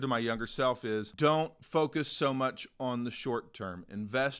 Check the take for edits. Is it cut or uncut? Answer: uncut